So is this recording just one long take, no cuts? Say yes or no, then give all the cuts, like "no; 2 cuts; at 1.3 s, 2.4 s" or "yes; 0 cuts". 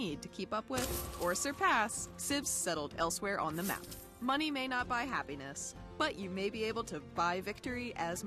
yes; 0 cuts